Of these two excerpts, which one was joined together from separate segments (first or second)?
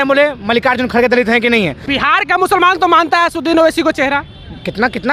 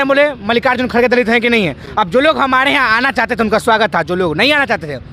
first